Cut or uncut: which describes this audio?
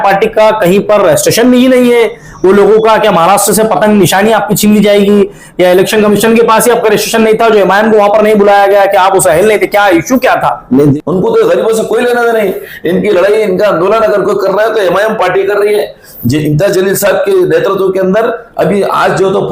cut